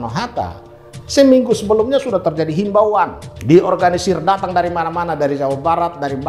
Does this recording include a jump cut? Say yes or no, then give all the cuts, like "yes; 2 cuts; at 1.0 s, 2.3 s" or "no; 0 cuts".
yes; 1 cut; at 3.3 s